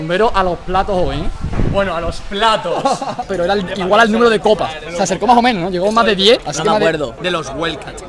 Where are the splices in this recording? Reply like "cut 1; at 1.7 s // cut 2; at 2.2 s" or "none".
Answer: cut 1; at 3.3 s // cut 2; at 7.1 s